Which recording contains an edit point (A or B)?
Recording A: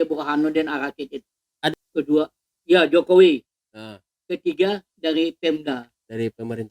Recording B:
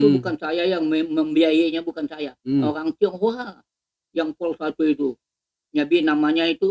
A